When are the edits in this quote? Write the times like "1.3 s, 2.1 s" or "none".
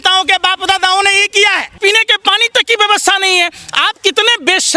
1.8 s